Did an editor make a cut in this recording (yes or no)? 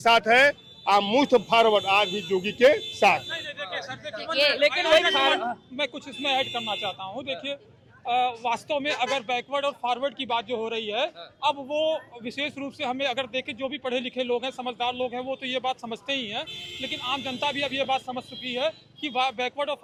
no